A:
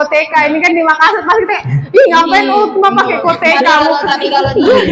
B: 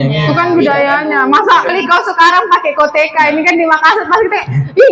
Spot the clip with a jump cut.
B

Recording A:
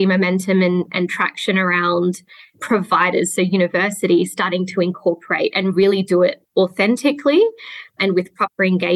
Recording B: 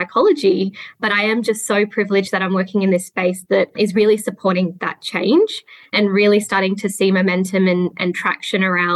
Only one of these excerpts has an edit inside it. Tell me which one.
B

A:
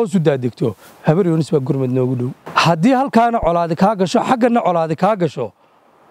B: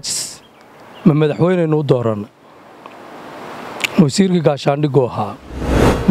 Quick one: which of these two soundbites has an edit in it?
A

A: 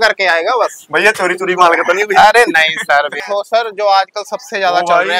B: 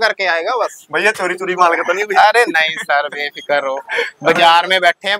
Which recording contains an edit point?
A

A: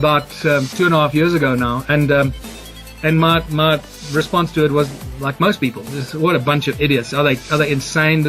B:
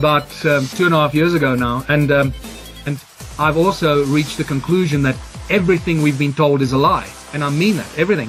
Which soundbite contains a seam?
A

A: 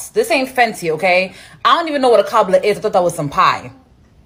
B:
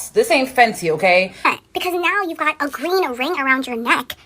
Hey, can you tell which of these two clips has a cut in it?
B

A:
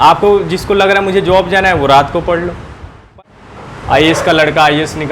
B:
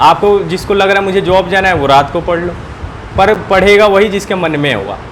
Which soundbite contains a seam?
A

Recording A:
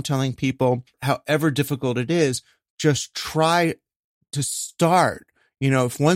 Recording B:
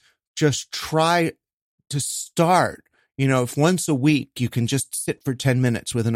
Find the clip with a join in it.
A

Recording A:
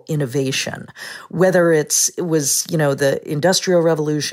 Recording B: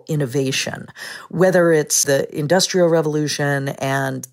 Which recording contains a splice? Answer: B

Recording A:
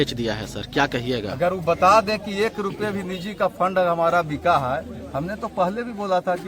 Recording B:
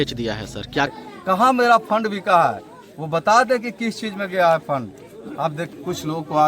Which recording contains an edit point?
B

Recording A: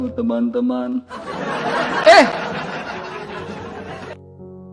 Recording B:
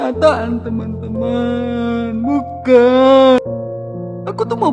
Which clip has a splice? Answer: B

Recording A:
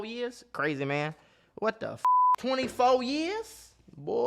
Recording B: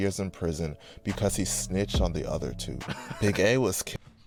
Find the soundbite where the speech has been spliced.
A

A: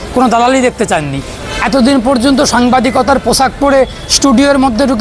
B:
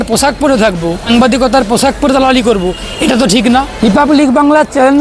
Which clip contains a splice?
B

